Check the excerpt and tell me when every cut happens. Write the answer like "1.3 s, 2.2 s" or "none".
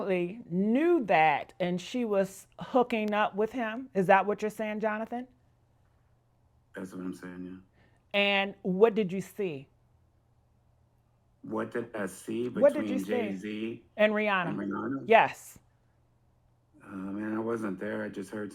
none